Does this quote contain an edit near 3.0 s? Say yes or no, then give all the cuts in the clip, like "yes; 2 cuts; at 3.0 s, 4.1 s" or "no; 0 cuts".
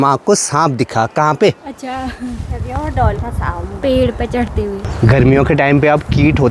no; 1 cut; at 4.9 s